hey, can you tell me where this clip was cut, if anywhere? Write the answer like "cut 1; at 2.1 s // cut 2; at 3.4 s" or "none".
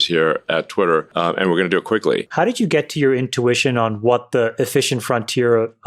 cut 1; at 1.1 s // cut 2; at 2.3 s